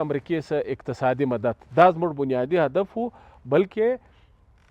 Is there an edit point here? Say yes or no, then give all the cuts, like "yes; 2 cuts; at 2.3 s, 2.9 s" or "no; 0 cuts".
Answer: no; 0 cuts